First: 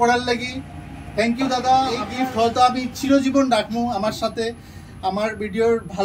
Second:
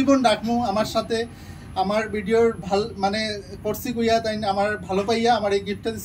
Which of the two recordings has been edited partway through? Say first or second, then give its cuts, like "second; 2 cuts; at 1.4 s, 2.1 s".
first; 1 cut; at 2.0 s